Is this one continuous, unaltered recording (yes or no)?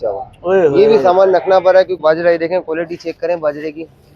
no